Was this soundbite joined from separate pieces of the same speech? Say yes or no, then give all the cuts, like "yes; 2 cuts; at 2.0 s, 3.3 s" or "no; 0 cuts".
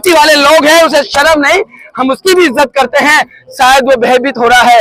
no; 0 cuts